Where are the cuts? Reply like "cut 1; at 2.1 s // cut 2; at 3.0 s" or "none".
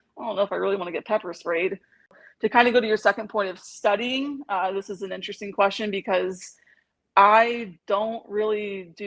cut 1; at 2.1 s